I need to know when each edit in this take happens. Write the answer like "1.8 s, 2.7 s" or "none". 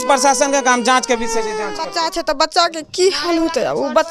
1.9 s